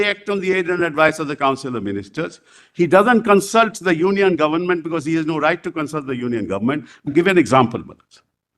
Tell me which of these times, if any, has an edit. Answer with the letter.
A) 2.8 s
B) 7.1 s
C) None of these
B